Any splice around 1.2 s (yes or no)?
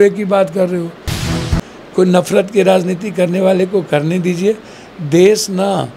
yes